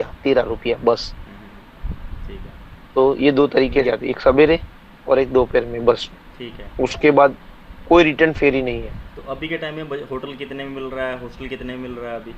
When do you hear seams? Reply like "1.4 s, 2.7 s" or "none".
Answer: 3.8 s